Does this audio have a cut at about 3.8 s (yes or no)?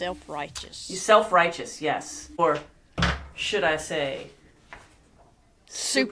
no